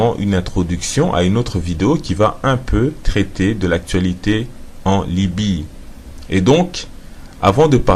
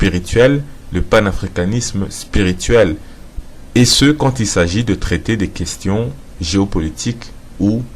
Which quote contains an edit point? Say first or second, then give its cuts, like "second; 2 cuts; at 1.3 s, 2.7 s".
second; 1 cut; at 6.4 s